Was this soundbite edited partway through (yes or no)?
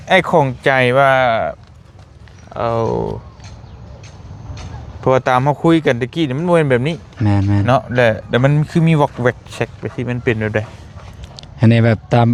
no